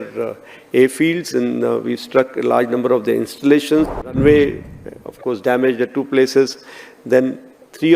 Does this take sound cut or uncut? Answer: cut